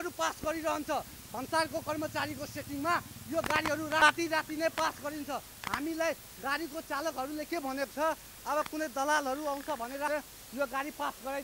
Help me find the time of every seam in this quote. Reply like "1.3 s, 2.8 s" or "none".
4.0 s, 10.1 s